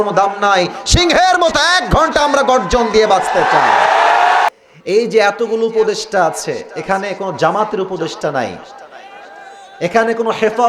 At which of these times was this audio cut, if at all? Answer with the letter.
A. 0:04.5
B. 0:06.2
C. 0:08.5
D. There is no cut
A